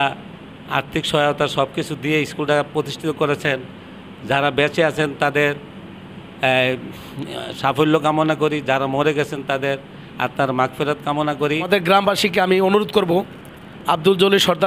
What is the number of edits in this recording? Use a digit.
1